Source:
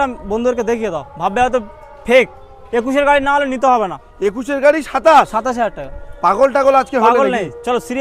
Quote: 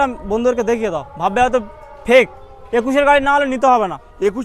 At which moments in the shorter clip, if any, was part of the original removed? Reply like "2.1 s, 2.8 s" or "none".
none